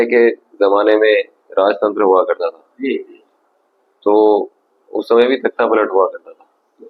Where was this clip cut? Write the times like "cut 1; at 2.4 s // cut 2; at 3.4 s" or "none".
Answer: none

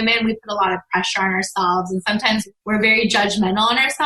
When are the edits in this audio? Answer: cut 1; at 2.5 s

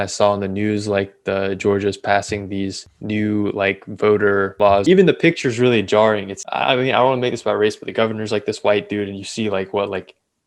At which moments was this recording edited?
cut 1; at 2.9 s // cut 2; at 4.6 s // cut 3; at 6.3 s

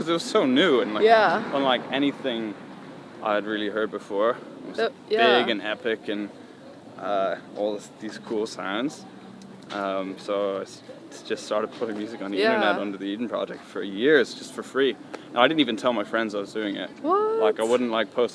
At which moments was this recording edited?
none

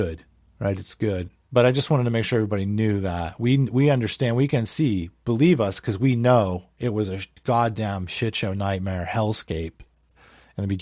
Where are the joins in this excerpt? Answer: cut 1; at 1.4 s

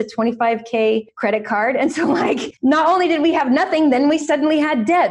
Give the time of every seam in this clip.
cut 1; at 1.1 s // cut 2; at 2.5 s

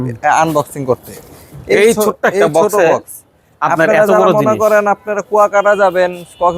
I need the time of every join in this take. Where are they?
none

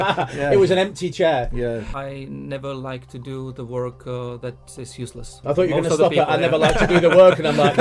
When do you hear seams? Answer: cut 1; at 1.9 s // cut 2; at 5.3 s

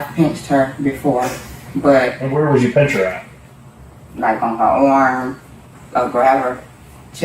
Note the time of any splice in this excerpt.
cut 1; at 2.2 s // cut 2; at 5.6 s

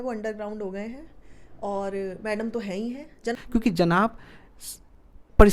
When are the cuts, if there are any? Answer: cut 1; at 3.4 s

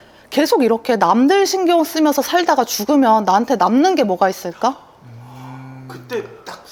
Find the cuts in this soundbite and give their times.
none

